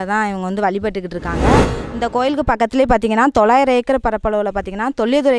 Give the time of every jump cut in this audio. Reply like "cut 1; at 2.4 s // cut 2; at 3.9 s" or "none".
cut 1; at 1.8 s

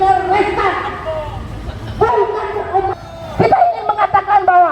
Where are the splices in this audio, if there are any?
cut 1; at 2.9 s

